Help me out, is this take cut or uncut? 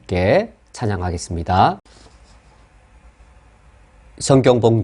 cut